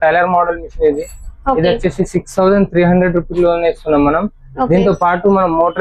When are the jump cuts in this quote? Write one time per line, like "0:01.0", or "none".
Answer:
none